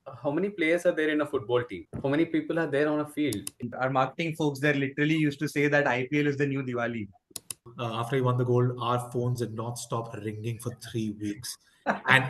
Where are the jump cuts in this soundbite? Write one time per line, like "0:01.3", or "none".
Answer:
0:03.5
0:07.7